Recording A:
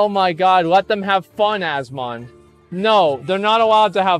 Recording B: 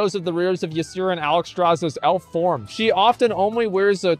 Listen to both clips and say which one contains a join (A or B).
B